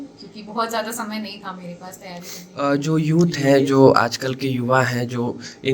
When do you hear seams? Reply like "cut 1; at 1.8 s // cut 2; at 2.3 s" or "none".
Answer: cut 1; at 2.4 s